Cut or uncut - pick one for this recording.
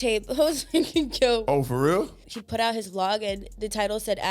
cut